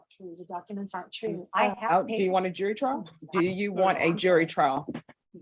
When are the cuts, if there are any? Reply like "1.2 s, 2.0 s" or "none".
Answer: 1.7 s, 3.1 s